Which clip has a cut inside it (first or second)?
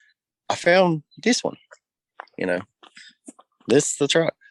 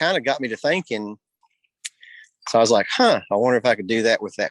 second